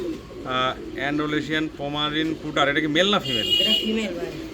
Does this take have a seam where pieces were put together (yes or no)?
no